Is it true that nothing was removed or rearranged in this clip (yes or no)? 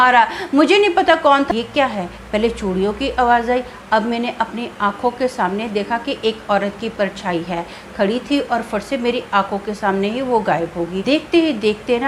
no